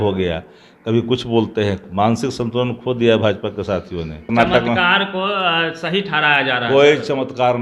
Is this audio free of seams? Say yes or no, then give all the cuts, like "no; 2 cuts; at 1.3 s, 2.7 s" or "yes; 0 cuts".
no; 1 cut; at 4.2 s